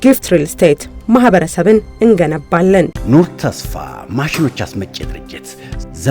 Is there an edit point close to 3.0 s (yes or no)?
yes